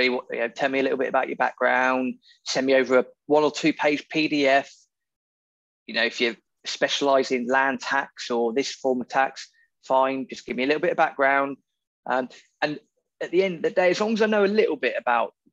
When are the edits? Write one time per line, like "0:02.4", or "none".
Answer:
none